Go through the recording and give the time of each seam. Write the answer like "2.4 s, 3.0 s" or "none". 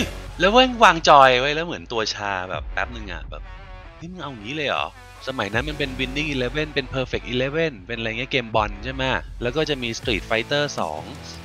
5.1 s

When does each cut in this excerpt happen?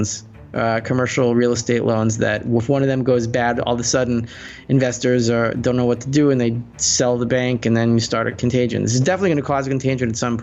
4.5 s

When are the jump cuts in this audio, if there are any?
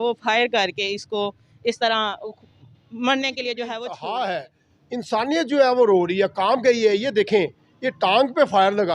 3.9 s

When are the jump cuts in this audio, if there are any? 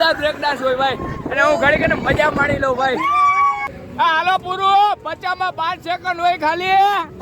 3.8 s

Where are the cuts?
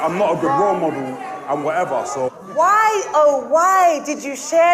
2.4 s

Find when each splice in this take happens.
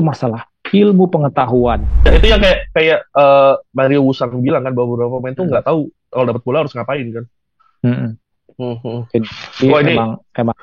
2.1 s

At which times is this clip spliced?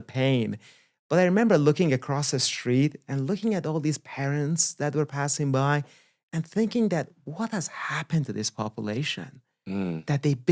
none

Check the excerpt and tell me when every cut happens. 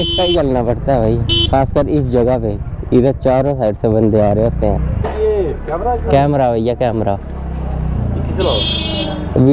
5.0 s

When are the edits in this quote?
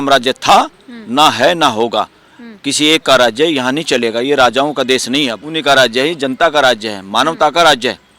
5.4 s

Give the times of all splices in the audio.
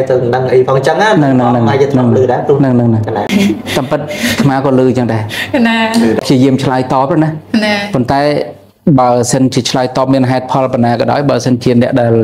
3.3 s, 6.2 s

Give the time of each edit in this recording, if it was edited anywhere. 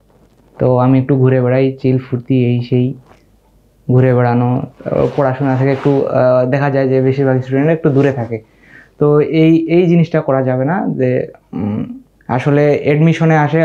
none

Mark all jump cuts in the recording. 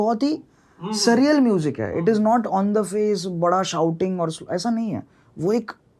none

